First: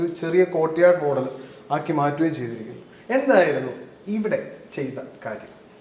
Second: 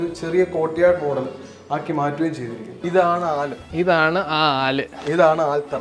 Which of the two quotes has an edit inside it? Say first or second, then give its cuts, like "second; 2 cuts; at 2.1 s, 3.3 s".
second; 1 cut; at 2.8 s